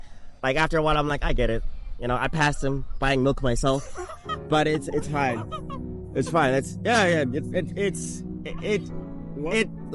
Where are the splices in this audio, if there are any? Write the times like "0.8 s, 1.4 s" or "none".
none